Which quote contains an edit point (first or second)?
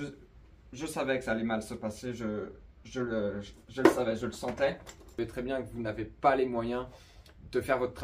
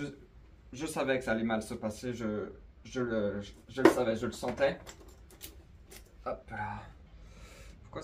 first